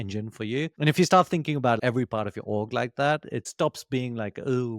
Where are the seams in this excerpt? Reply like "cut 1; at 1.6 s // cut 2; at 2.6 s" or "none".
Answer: cut 1; at 3.4 s